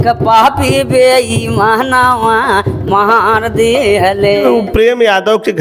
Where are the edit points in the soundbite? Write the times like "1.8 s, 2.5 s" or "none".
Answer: 4.4 s